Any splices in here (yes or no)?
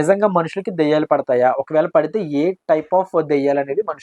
no